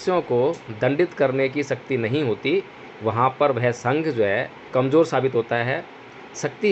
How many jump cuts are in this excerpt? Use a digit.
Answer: 1